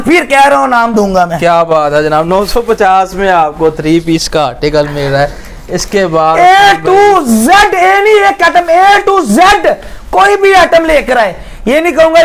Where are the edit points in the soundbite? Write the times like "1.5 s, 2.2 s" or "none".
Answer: none